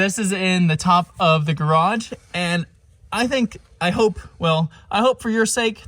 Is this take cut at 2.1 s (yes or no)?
no